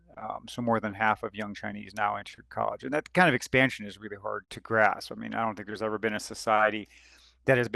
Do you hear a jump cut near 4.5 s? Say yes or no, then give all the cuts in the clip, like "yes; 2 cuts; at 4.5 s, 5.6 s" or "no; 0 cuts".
yes; 1 cut; at 4.5 s